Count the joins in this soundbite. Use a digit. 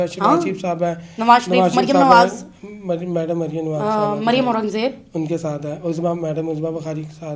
0